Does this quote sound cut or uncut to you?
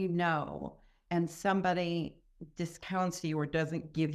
uncut